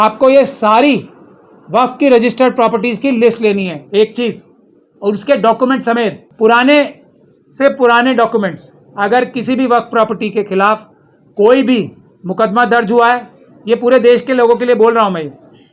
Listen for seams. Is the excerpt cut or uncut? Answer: cut